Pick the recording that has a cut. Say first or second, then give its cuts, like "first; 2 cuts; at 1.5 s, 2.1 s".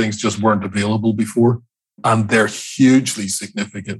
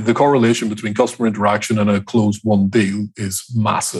first; 1 cut; at 2.0 s